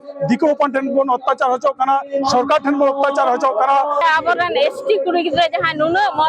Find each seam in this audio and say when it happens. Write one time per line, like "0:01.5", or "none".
0:04.0